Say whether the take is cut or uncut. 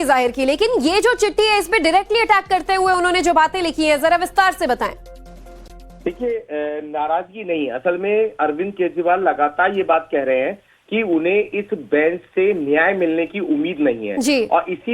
cut